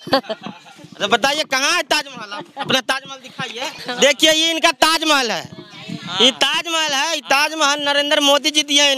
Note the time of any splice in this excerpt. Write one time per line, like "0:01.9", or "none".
0:03.8